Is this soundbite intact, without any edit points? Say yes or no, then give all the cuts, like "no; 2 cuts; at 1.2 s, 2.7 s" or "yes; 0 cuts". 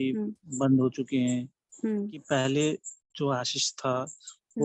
no; 1 cut; at 2.2 s